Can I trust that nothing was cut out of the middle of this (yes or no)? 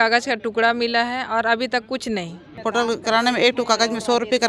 no